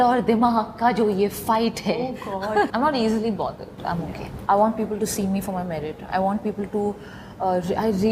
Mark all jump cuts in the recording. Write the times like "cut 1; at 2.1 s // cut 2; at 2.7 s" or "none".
cut 1; at 2.7 s // cut 2; at 4.2 s